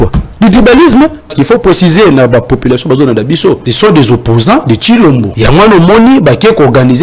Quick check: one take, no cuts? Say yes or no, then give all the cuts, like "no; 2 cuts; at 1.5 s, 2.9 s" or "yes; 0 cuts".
no; 3 cuts; at 1.3 s, 3.7 s, 5.3 s